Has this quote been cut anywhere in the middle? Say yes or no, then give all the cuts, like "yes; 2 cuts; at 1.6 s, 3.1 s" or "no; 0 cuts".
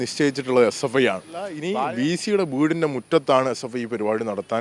yes; 1 cut; at 1.6 s